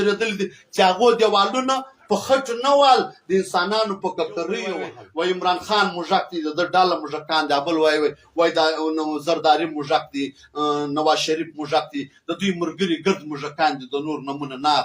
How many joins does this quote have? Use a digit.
1